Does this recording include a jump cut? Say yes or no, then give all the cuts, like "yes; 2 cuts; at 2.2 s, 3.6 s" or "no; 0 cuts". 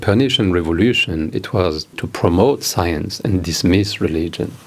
yes; 1 cut; at 2.1 s